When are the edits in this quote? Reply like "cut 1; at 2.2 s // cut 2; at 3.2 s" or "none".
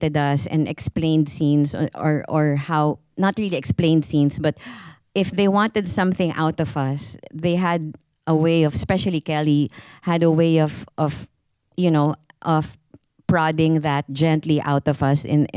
none